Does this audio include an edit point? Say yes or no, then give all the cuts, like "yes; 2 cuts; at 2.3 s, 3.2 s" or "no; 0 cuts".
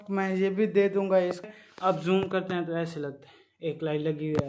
yes; 1 cut; at 1.5 s